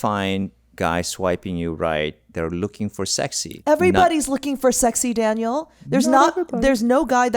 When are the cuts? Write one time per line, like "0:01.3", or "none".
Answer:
0:03.6